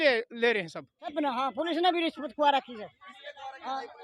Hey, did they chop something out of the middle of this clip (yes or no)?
yes